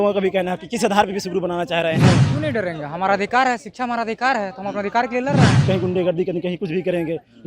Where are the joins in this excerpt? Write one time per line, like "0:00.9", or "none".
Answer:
0:02.3
0:05.6